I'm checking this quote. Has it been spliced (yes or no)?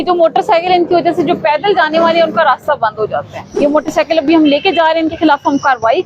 yes